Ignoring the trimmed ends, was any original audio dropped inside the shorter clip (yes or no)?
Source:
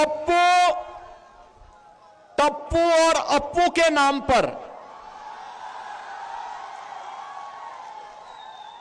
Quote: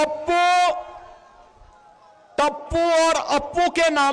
no